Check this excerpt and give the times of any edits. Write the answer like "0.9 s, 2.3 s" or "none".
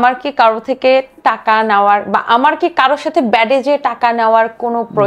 none